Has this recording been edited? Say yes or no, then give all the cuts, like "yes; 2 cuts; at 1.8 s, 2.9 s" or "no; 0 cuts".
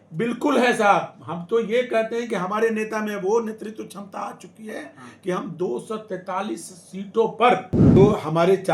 yes; 1 cut; at 7.8 s